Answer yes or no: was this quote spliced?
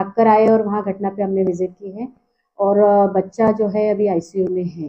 no